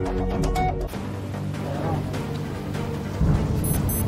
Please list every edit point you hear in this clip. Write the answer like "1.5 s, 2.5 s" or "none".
0.9 s